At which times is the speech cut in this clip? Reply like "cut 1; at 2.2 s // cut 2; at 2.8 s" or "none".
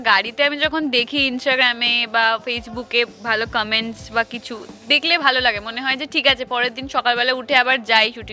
none

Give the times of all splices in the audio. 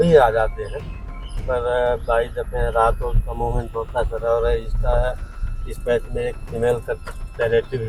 none

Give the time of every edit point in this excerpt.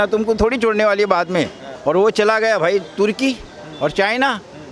cut 1; at 1.6 s

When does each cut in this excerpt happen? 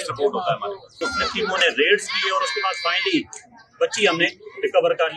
cut 1; at 1.0 s

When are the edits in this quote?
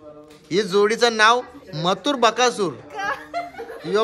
none

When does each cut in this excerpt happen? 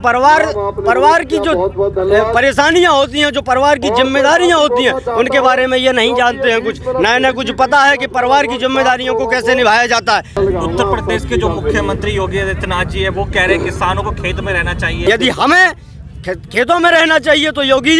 cut 1; at 10.4 s // cut 2; at 15.0 s

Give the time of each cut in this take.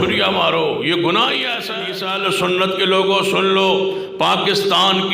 cut 1; at 1.8 s

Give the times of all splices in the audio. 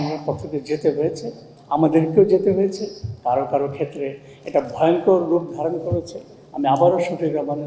none

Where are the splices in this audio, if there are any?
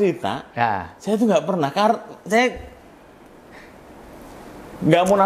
none

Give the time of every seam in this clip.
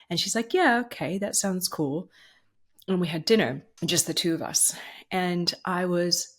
cut 1; at 3.7 s

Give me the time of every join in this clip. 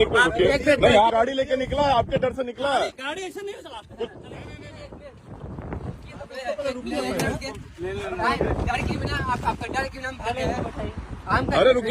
cut 1; at 1.1 s

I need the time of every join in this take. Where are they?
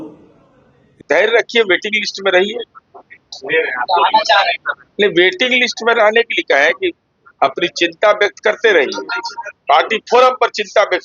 cut 1; at 1.0 s

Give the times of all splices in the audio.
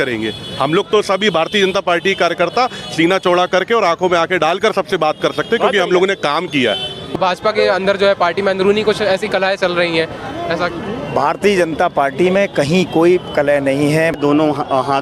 cut 1; at 7.1 s // cut 2; at 14.2 s

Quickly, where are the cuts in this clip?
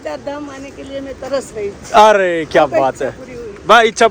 none

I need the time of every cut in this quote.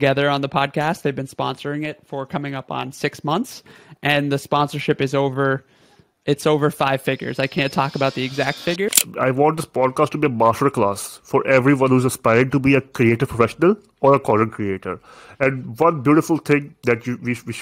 cut 1; at 8.7 s

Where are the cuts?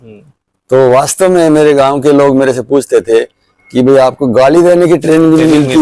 none

